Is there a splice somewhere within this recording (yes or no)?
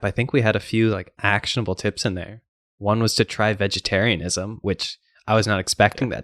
no